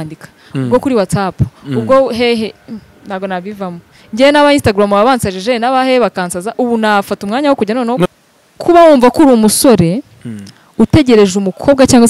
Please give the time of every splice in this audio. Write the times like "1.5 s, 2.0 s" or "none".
8.1 s